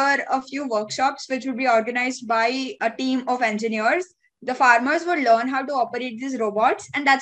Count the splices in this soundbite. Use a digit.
0